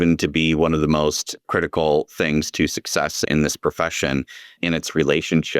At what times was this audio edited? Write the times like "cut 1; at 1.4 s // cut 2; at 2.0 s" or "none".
cut 1; at 1.5 s // cut 2; at 3.2 s // cut 3; at 4.6 s